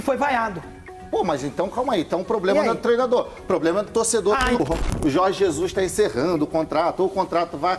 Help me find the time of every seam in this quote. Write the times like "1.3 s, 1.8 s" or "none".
4.6 s